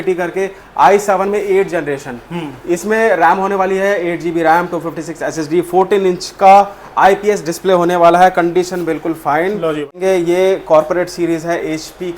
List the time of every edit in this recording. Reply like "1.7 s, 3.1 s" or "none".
9.9 s